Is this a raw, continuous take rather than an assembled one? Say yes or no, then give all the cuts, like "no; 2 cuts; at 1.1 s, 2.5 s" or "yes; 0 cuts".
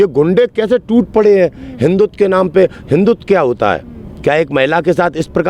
yes; 0 cuts